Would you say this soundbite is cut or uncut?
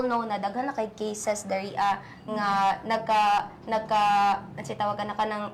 uncut